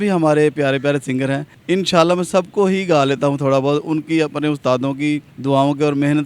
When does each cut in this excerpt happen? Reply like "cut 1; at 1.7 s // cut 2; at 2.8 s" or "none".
cut 1; at 1.5 s // cut 2; at 5.3 s